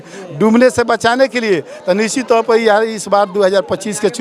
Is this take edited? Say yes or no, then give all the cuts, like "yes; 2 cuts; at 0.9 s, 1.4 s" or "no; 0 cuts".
no; 0 cuts